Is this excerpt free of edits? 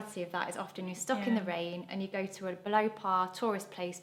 yes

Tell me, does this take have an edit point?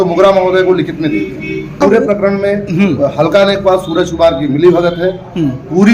yes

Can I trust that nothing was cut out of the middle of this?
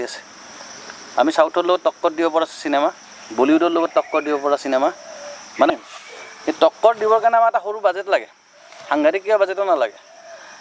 no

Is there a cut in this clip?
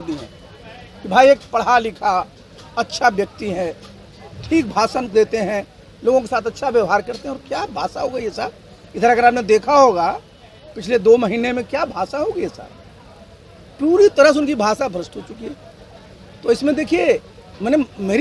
no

